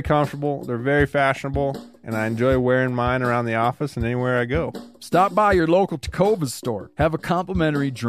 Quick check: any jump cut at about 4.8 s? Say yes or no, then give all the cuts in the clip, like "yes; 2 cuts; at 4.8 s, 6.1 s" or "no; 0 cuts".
yes; 2 cuts; at 4.8 s, 6.9 s